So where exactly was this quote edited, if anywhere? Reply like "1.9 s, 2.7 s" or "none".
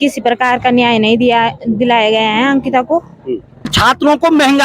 3.7 s